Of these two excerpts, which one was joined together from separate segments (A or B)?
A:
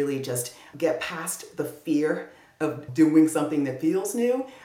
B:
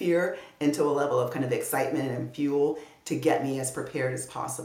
A